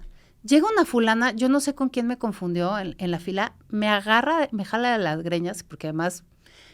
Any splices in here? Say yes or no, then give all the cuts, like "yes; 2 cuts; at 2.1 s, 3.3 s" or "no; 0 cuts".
no; 0 cuts